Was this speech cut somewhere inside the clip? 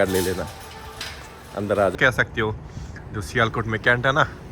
yes; 1 cut; at 1.9 s

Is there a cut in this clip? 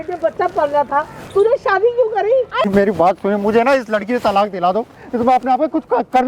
yes; 1 cut; at 2.7 s

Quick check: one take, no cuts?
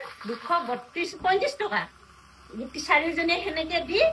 yes; 0 cuts

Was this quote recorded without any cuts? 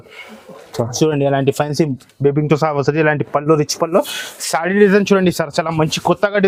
yes; 0 cuts

